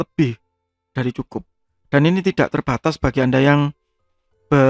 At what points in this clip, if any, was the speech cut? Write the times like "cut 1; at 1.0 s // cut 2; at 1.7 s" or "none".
none